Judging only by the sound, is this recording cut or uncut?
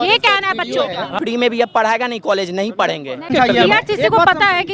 cut